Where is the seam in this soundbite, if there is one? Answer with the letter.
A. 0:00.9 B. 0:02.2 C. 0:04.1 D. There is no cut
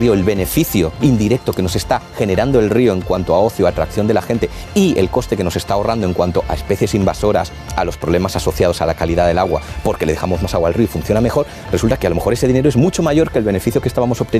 A